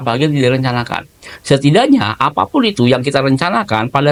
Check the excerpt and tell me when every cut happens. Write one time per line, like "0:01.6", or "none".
none